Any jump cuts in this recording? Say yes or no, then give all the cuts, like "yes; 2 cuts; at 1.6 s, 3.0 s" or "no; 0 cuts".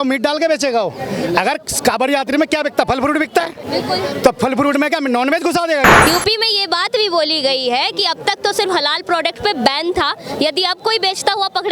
yes; 1 cut; at 5.9 s